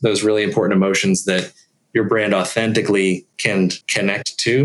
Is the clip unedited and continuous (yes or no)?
no